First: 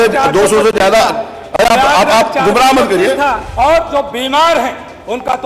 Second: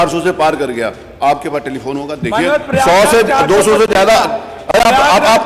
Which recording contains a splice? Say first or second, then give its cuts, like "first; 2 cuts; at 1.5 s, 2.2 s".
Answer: first; 1 cut; at 3.4 s